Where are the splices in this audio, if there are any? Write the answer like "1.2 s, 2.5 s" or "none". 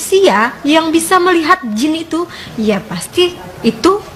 none